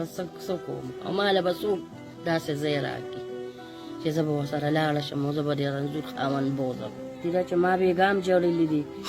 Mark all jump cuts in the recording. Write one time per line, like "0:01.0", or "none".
0:07.0